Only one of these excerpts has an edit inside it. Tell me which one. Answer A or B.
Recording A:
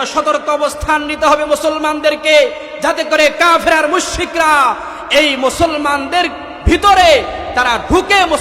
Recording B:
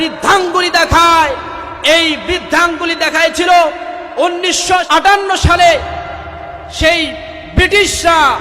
B